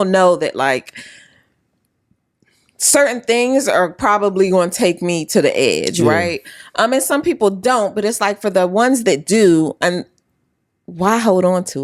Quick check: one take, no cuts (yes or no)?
yes